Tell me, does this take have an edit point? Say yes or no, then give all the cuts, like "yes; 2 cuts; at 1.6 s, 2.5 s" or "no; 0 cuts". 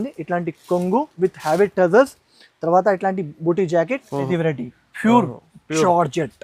yes; 1 cut; at 4.3 s